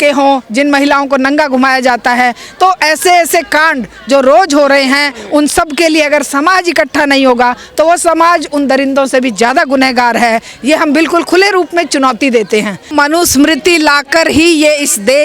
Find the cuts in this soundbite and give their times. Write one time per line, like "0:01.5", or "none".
0:12.9